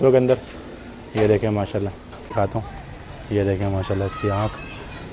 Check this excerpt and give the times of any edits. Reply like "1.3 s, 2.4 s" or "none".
2.3 s